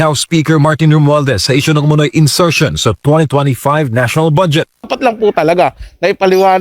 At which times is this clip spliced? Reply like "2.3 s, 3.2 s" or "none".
4.9 s